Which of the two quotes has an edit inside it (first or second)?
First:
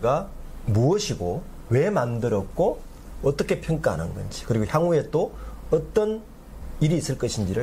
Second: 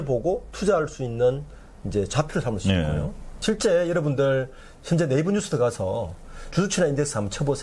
second